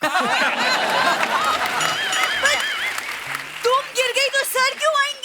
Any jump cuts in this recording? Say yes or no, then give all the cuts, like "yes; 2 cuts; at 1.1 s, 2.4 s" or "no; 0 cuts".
no; 0 cuts